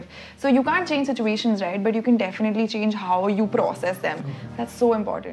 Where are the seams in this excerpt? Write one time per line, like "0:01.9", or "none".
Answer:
none